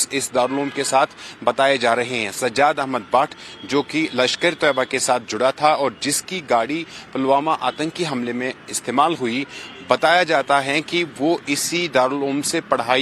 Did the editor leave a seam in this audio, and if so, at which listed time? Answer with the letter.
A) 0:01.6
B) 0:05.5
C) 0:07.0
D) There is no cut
A